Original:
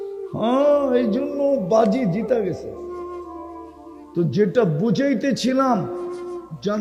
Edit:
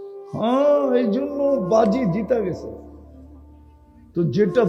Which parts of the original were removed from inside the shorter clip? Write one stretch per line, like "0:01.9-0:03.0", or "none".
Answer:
none